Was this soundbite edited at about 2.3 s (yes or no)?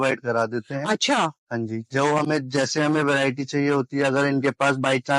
no